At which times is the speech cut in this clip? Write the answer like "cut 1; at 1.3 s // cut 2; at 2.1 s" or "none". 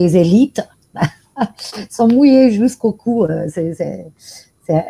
none